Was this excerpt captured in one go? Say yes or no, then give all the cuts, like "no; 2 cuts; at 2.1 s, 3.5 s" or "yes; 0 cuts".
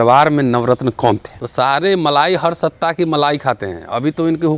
no; 1 cut; at 1.4 s